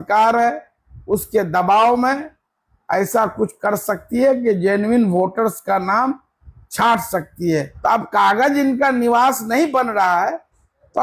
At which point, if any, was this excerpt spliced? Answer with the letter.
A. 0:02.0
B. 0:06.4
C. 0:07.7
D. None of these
C